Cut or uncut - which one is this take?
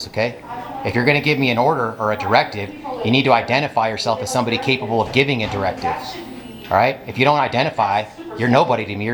uncut